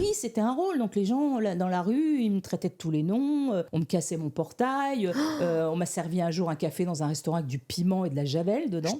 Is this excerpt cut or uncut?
uncut